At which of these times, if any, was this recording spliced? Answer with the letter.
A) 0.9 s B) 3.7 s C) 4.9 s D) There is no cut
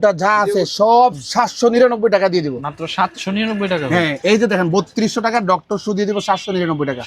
D